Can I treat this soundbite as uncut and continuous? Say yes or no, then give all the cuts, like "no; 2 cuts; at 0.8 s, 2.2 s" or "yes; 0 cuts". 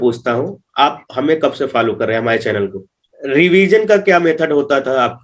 no; 1 cut; at 2.9 s